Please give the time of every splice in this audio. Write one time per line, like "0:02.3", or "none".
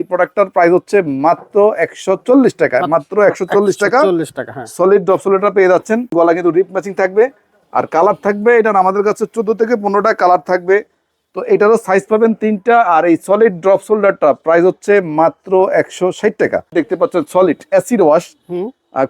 0:06.1
0:16.7